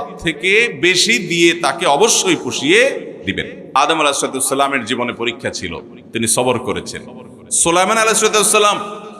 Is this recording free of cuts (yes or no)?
no